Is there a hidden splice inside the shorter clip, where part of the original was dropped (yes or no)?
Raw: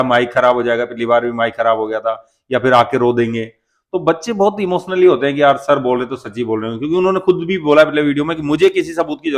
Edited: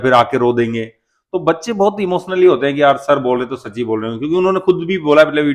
no